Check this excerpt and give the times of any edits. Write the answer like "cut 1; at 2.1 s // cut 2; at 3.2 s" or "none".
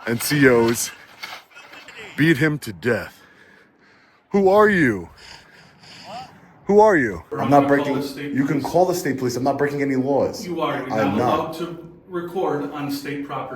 cut 1; at 7.3 s

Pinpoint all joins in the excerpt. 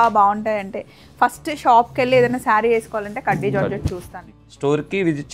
cut 1; at 4.1 s

